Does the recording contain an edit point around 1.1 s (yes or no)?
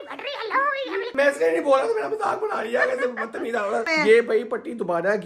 yes